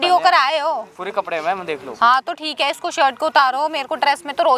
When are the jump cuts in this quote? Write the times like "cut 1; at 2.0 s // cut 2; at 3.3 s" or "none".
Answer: none